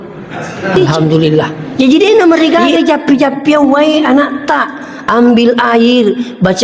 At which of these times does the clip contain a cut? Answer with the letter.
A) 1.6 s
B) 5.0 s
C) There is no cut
A